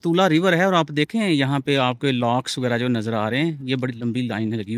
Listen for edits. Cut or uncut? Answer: uncut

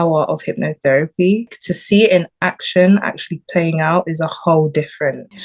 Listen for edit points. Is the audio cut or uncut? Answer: uncut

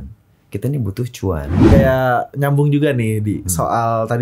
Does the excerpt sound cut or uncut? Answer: cut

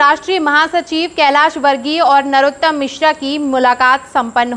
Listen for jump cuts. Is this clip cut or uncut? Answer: uncut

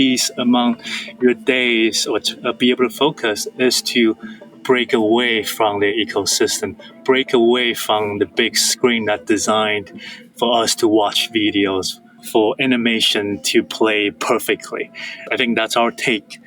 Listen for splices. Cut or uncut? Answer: cut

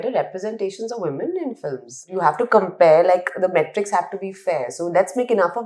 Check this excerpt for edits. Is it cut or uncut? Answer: cut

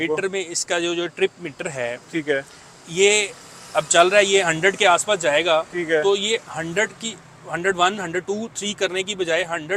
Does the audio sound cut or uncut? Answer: uncut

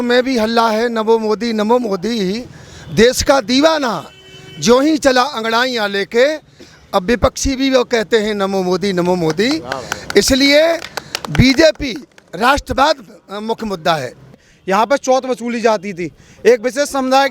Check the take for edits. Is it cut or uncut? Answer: cut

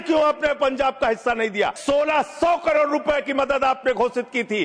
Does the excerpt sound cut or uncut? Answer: cut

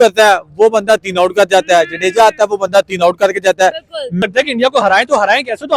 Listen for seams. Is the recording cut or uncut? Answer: cut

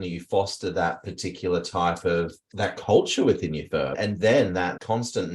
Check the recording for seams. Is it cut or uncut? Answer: cut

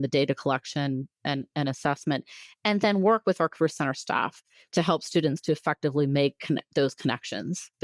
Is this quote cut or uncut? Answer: uncut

